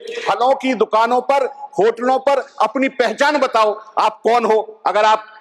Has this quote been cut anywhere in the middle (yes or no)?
no